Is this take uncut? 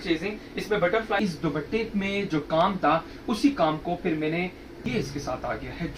no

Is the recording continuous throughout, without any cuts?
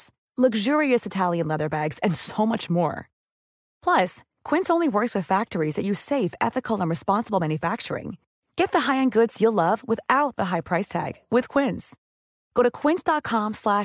yes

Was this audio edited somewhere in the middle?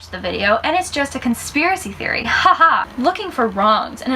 yes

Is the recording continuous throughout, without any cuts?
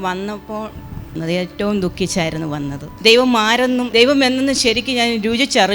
no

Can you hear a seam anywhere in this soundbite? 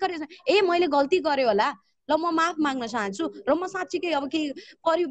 no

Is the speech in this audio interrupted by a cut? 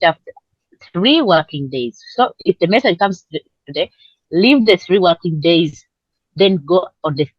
no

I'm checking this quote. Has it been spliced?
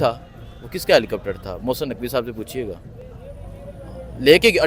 no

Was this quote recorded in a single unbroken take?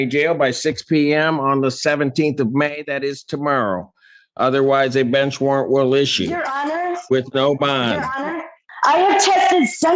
no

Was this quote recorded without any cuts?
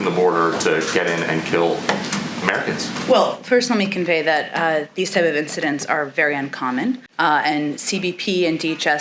yes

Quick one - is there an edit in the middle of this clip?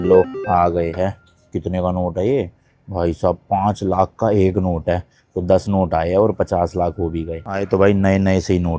no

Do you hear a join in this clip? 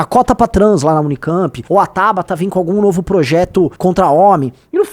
yes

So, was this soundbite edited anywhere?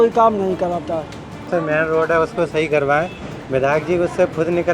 yes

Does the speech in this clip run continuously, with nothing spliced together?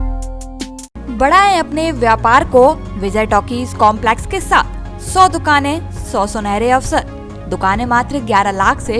yes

